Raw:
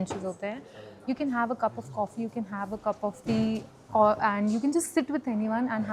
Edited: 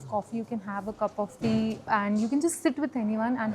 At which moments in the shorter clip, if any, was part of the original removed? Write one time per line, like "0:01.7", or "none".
0:01.9